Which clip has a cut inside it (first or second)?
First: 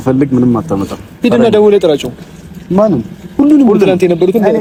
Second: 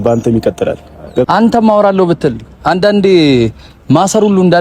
second